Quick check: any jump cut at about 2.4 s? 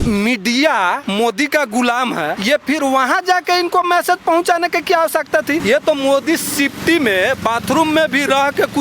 yes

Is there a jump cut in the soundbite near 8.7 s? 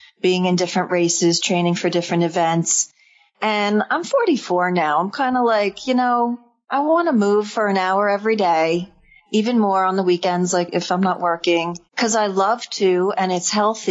no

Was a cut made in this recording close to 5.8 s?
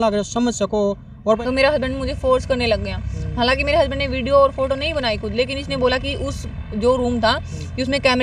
no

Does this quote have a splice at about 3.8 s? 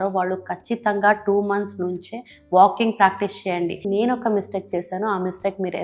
yes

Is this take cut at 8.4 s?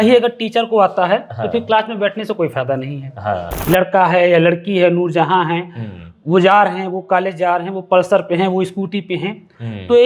no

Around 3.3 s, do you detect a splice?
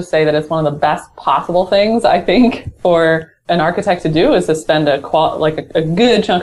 yes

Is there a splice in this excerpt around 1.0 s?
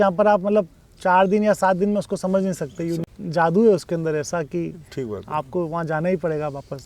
no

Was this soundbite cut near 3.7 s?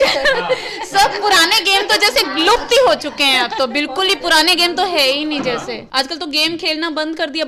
no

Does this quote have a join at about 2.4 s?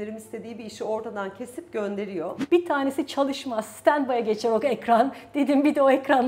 yes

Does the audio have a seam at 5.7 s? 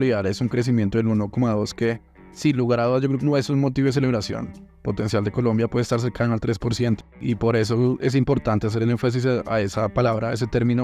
no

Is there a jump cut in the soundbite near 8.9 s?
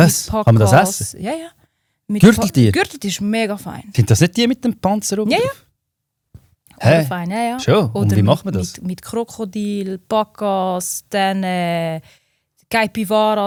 no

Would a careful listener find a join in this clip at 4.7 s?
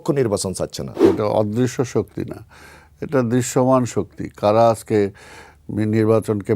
no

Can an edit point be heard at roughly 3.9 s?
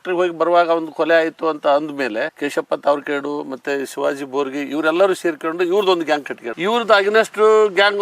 no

